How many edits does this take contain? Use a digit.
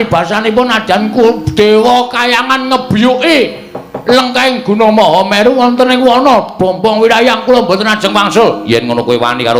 0